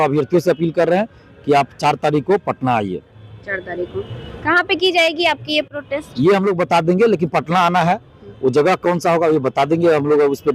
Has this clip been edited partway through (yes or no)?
no